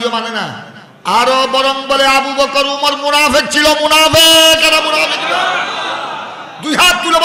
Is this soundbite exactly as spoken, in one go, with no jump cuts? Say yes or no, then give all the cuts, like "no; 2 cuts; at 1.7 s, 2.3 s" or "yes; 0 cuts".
yes; 0 cuts